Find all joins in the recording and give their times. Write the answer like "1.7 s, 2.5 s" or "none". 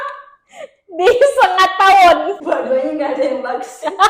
2.4 s